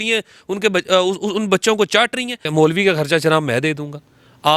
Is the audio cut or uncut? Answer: cut